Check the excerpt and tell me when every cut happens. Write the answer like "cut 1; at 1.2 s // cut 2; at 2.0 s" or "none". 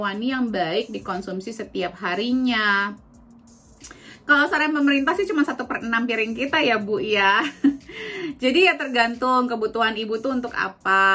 none